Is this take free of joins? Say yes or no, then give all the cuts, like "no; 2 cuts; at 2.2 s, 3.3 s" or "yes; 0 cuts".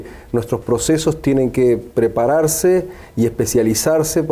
yes; 0 cuts